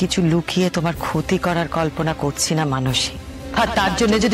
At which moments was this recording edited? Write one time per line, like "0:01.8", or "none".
0:03.4